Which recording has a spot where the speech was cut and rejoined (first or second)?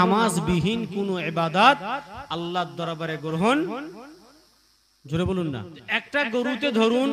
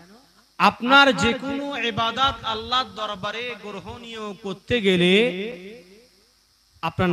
first